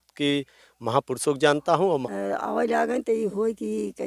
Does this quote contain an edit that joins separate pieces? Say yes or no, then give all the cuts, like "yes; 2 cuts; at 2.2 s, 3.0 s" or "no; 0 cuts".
yes; 1 cut; at 2.1 s